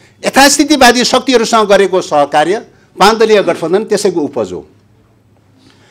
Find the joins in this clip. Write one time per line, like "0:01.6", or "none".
none